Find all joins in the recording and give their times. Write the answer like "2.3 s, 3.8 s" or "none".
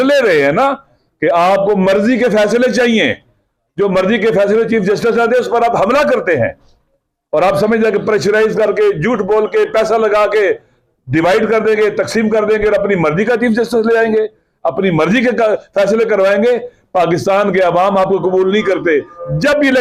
none